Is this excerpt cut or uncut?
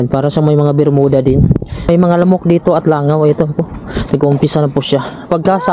cut